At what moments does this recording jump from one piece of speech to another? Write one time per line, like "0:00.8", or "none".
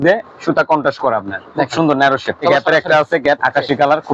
0:01.4
0:02.4
0:03.4